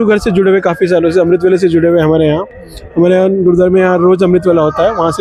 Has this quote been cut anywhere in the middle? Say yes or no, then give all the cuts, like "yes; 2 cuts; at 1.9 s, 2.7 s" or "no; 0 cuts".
no; 0 cuts